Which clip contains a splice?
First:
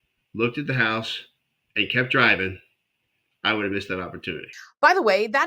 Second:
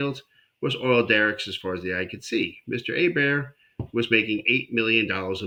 first; 1 cut; at 4.5 s

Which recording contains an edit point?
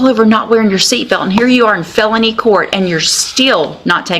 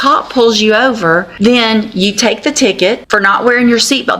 second; 2 cuts; at 1.3 s, 3.0 s

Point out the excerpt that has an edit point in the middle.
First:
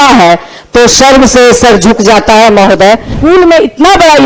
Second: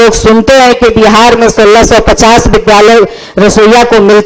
first; 1 cut; at 3.1 s

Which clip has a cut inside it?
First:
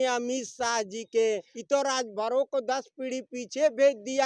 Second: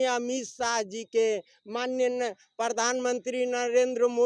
first; 1 cut; at 1.5 s

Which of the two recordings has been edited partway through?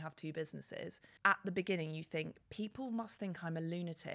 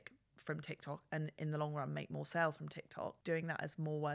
second; 1 cut; at 3.2 s

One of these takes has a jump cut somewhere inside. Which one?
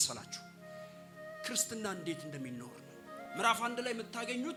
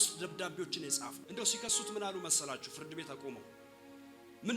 second; 1 cut; at 1.2 s

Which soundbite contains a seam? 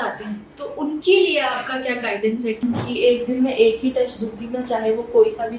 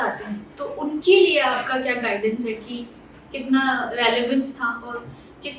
first; 1 cut; at 2.6 s

